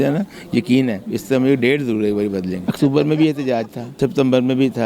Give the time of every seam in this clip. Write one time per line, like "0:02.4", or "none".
0:02.6
0:03.8